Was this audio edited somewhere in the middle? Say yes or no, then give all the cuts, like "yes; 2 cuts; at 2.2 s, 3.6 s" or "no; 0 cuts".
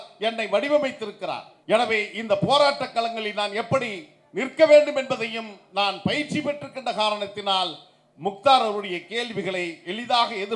yes; 1 cut; at 1.5 s